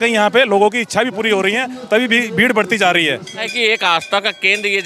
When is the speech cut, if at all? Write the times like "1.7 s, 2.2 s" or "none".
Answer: 3.5 s